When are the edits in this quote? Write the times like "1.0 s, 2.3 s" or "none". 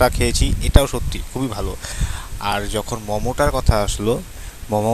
none